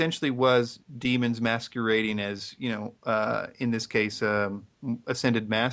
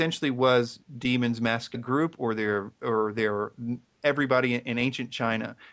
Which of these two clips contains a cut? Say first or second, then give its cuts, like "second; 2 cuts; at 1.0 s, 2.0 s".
first; 1 cut; at 1.8 s